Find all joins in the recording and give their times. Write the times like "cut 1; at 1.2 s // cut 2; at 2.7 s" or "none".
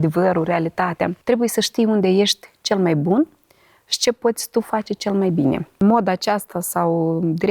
cut 1; at 1.2 s // cut 2; at 5.8 s